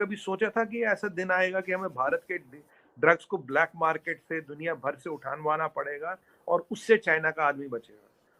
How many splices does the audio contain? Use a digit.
0